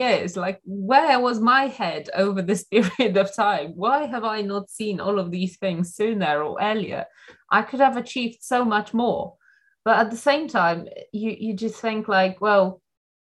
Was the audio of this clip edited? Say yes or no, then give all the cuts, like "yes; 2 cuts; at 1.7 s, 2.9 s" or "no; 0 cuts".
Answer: no; 0 cuts